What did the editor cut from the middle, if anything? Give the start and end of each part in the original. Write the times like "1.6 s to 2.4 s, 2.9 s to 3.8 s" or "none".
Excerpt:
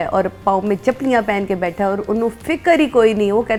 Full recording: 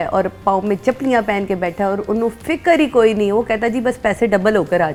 none